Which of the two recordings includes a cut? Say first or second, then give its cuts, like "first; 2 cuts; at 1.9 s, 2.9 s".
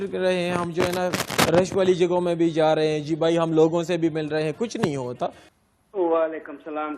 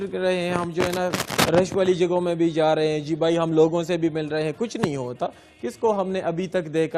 first; 1 cut; at 5.5 s